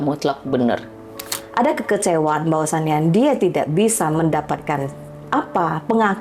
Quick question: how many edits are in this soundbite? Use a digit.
1